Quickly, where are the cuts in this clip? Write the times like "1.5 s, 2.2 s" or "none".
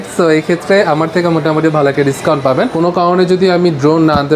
2.7 s